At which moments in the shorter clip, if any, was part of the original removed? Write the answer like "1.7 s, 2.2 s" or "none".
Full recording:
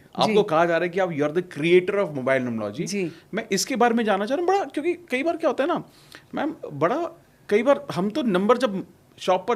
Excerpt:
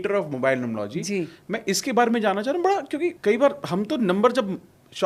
3.2 s